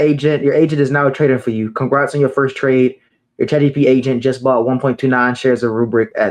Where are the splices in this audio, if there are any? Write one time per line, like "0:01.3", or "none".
none

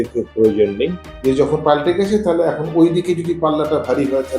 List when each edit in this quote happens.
0:01.1

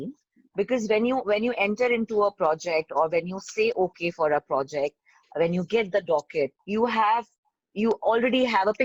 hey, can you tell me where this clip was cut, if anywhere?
none

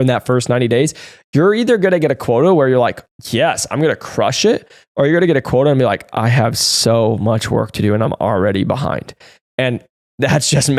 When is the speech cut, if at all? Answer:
none

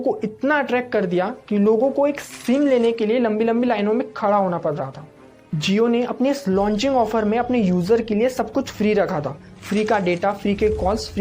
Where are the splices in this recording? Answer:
none

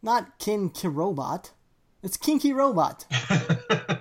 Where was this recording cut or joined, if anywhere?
0:03.1

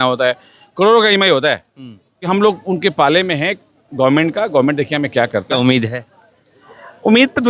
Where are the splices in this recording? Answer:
0:02.2

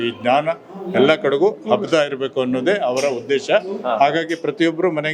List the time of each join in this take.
none

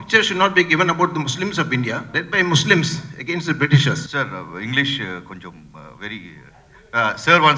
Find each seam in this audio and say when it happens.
0:02.1
0:04.1

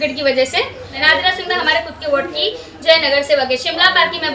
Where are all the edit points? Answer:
0:01.0

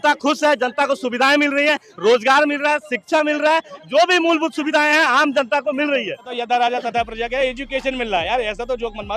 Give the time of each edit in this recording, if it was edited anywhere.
0:06.3

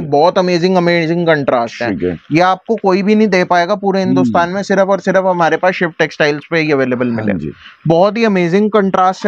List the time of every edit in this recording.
none

